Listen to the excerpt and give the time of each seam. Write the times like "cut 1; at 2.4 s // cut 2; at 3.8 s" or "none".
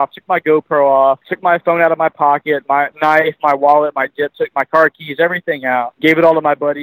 cut 1; at 1.3 s // cut 2; at 2.9 s // cut 3; at 5.9 s